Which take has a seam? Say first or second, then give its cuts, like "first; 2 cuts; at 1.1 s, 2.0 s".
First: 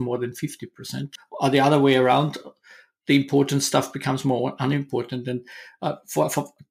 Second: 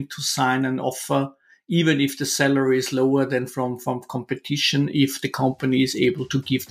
first; 1 cut; at 1.2 s